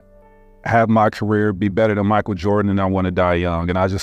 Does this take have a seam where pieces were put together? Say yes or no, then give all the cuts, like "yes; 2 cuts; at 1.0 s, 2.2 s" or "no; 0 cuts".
no; 0 cuts